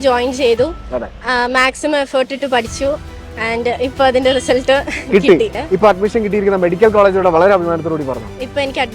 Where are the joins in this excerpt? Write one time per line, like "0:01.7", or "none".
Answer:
0:05.6